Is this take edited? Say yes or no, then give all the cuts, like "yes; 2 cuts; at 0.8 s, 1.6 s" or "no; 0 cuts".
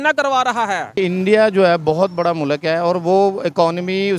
yes; 1 cut; at 1.0 s